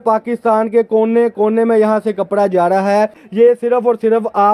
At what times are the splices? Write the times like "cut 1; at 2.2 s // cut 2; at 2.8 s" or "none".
cut 1; at 3.2 s